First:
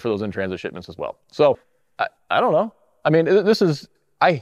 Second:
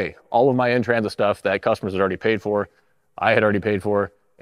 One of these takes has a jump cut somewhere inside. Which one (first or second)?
first